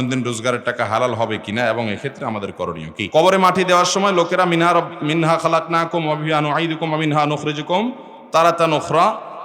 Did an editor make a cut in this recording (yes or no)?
yes